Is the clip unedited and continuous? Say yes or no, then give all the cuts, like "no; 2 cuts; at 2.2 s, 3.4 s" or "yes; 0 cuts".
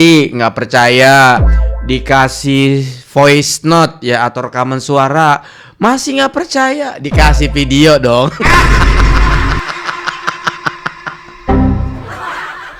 yes; 0 cuts